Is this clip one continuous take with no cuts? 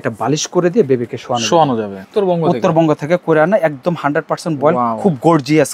no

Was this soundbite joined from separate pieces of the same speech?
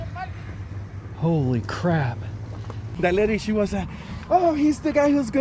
yes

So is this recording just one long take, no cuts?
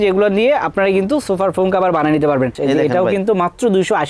no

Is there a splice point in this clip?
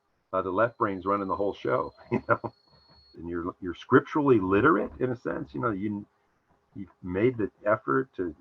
yes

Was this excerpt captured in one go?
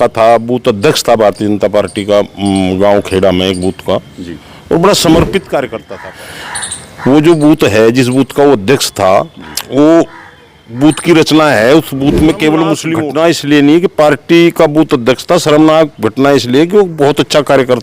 no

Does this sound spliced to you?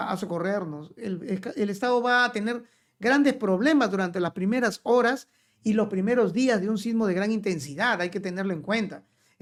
no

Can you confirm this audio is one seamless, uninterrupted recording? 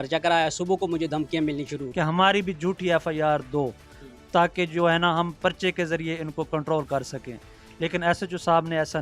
no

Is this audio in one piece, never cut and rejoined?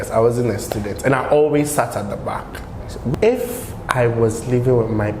no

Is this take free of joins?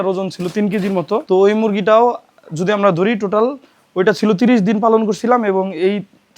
no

